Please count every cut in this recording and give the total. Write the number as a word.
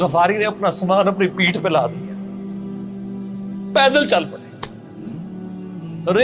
zero